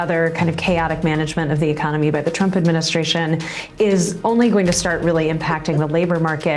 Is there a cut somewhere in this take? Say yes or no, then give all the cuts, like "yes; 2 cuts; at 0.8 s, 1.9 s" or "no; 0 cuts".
no; 0 cuts